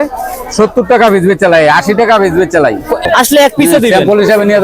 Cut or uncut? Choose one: cut